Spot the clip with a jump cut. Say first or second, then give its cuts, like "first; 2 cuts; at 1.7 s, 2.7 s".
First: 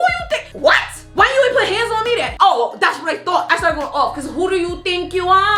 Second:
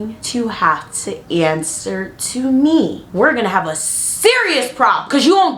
first; 3 cuts; at 1.1 s, 2.3 s, 3.4 s